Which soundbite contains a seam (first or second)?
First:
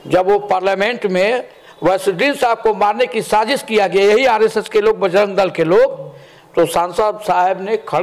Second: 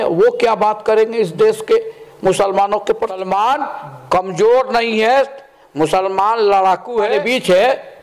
second